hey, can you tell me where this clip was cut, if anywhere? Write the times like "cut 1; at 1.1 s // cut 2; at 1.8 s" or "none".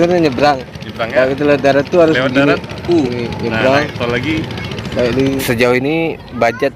cut 1; at 5.4 s